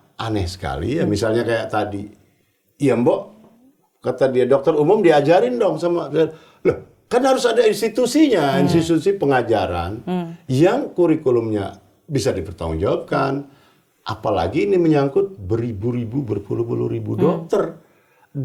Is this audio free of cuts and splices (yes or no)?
yes